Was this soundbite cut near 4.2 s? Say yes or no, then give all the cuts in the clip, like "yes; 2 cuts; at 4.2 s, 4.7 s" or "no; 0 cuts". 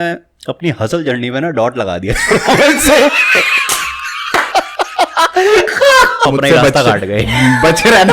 no; 1 cut; at 6.3 s